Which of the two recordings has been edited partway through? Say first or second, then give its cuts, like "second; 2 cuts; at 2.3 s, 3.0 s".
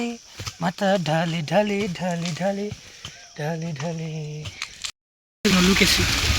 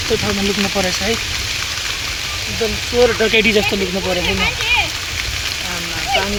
first; 1 cut; at 5.2 s